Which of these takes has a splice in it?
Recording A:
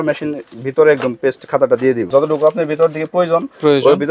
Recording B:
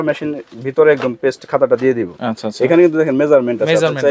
A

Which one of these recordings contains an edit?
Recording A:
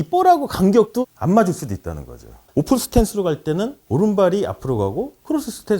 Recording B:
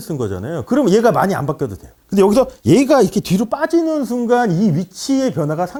A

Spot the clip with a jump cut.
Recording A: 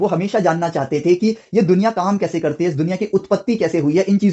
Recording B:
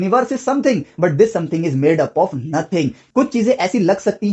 B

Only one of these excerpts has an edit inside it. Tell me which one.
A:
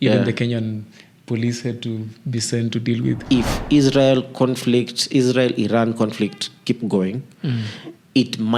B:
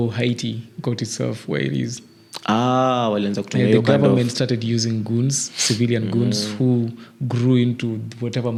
A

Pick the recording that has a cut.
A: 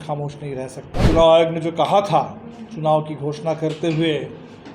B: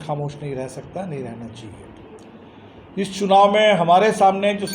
A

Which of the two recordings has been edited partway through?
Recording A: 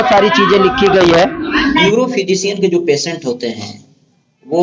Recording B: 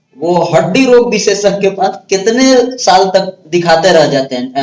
A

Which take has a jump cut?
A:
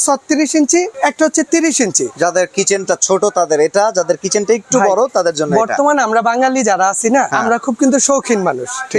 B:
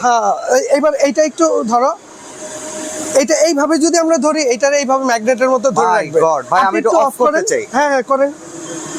A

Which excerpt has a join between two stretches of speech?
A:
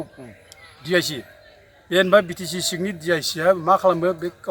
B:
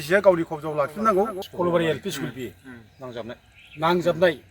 B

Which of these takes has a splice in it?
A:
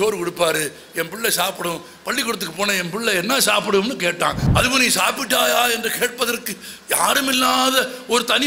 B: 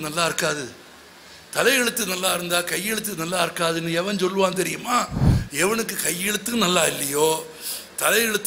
A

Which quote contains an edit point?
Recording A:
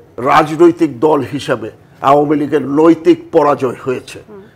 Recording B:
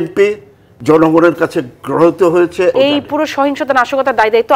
B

